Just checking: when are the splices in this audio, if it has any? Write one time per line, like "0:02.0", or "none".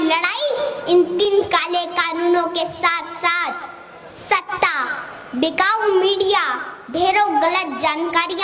0:01.2